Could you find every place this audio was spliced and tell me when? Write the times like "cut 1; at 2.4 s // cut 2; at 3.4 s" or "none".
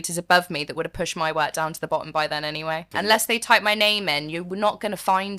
cut 1; at 2.9 s